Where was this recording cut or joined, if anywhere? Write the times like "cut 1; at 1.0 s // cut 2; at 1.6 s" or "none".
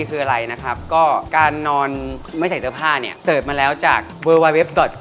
none

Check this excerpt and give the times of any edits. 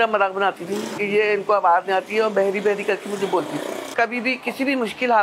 cut 1; at 0.9 s // cut 2; at 3.9 s

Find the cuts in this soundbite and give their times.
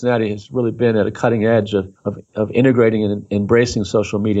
none

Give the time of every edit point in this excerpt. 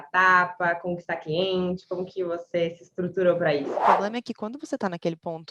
cut 1; at 3.8 s

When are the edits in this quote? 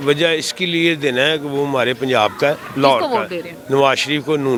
none

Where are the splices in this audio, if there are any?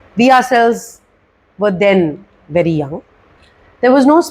cut 1; at 3.4 s

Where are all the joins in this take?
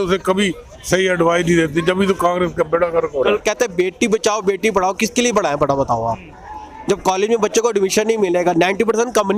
cut 1; at 3.4 s

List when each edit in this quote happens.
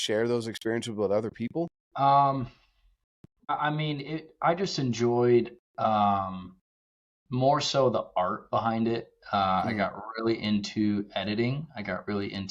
cut 1; at 1.8 s // cut 2; at 3.5 s

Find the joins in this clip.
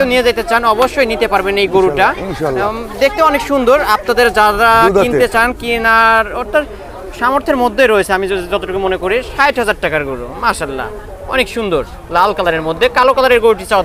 none

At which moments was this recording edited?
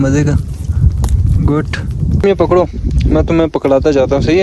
cut 1; at 2.1 s

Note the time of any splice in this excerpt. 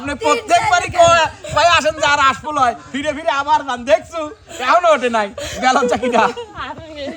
none

